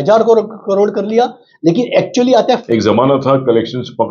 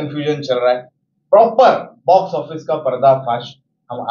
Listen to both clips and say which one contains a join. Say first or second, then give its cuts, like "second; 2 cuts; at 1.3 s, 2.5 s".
first; 1 cut; at 2.4 s